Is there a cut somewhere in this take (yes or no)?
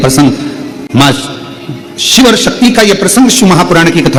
no